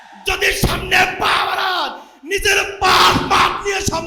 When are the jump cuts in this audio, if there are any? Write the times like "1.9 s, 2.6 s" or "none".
none